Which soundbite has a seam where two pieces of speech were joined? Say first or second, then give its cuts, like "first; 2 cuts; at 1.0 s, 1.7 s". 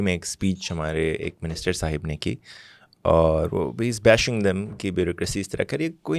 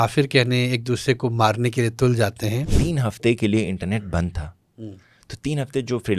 second; 1 cut; at 2.8 s